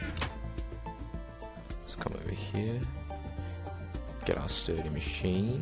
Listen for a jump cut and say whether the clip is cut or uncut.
uncut